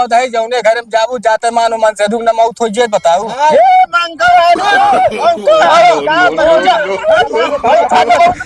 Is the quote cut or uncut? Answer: uncut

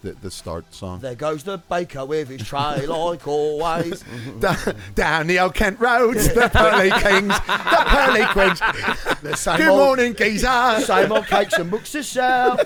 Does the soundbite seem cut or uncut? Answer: uncut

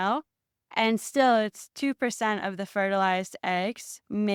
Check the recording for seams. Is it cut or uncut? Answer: uncut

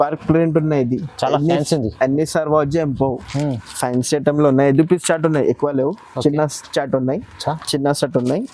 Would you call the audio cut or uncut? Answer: uncut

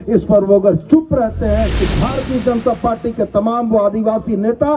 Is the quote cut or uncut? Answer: cut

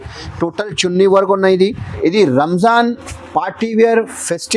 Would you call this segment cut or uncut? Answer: cut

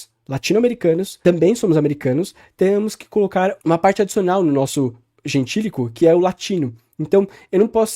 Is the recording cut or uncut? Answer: uncut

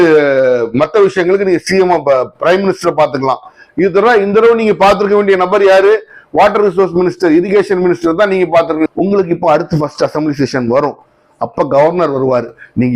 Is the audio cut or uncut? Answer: cut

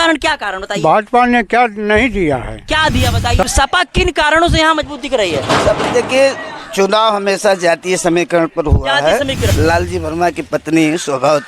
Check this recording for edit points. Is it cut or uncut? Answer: cut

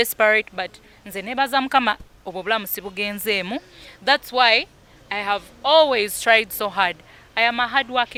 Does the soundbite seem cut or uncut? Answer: uncut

